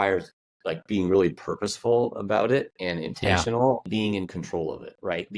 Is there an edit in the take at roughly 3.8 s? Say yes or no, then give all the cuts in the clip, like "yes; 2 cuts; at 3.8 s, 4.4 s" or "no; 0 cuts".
yes; 1 cut; at 3.8 s